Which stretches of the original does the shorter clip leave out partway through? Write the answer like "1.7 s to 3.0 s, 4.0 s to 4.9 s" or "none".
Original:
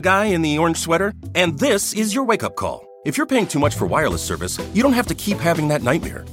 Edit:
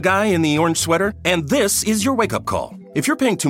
1.2 s to 1.3 s

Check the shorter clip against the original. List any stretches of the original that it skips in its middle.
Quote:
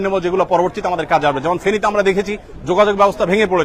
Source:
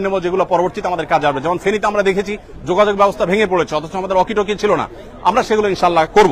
none

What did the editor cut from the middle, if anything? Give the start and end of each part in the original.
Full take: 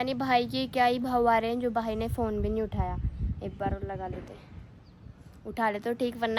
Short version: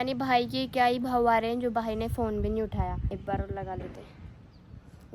3.0 s to 3.4 s

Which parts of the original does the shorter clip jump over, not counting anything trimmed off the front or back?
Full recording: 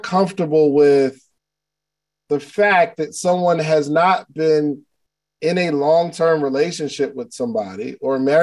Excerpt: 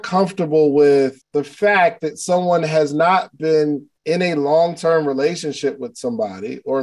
1.2 s to 2.2 s, 4.9 s to 5.3 s

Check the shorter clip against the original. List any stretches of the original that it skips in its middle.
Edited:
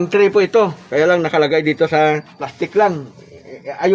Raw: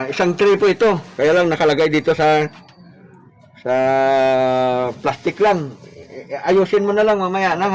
2.7 s to 5.1 s

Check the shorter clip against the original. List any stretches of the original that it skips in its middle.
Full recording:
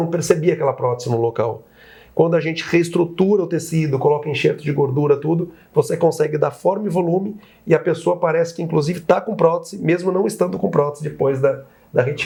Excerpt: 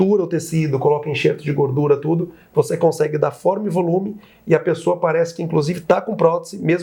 none

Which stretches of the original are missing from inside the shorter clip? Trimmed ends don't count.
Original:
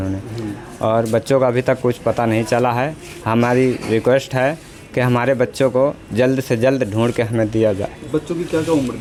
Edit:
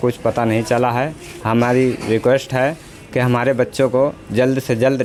none

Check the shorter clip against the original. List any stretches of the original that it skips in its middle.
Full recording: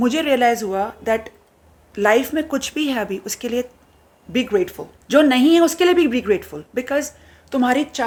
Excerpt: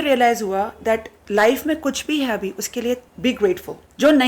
1.4 s to 1.8 s, 3.8 s to 4.2 s

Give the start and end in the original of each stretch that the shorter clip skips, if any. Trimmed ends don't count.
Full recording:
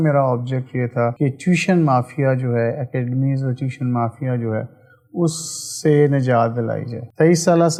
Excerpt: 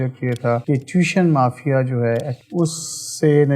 2.9 s to 5.0 s

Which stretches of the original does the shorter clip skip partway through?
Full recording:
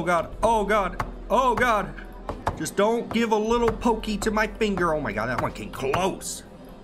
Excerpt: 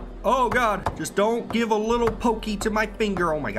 2.0 s to 2.5 s

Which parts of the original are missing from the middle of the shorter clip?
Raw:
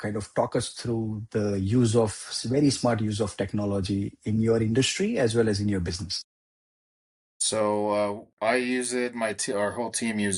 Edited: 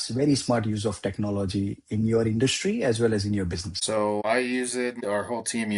6.4 s to 8.3 s, 9.1 s to 9.4 s

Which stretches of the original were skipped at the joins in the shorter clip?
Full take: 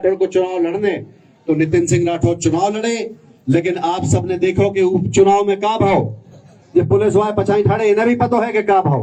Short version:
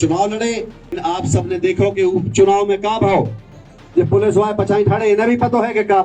3.4 s to 3.8 s

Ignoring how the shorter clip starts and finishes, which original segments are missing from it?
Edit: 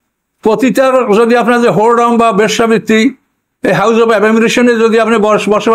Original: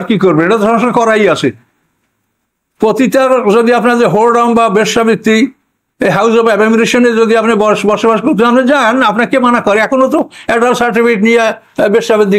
none

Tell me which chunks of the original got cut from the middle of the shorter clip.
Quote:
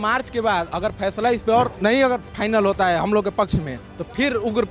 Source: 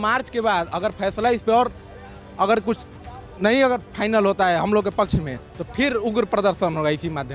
1.7 s to 3.3 s

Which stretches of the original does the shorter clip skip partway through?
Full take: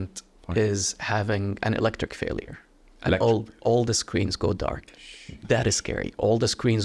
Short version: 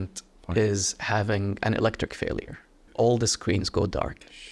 2.8 s to 3.5 s

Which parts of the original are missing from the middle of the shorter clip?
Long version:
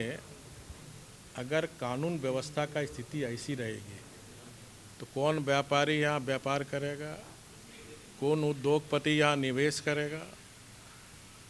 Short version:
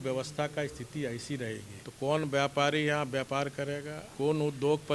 4.0 s to 4.9 s, 7.1 s to 8.0 s

